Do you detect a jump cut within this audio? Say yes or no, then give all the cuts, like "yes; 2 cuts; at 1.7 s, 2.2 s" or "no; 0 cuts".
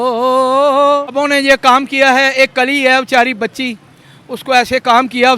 yes; 1 cut; at 1.2 s